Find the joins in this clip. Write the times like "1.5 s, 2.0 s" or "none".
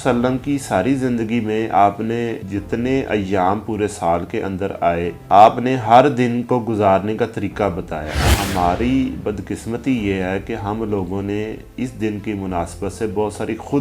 2.4 s, 5.2 s, 8.2 s